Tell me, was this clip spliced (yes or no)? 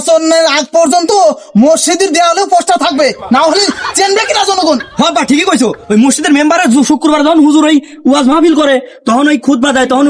no